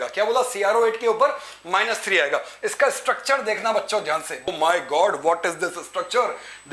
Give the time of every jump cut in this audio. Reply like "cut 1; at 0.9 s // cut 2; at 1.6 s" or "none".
cut 1; at 4.5 s